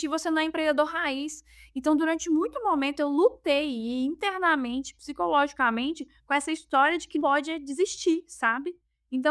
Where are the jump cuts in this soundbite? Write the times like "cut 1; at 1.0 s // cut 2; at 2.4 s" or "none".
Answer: cut 1; at 7.2 s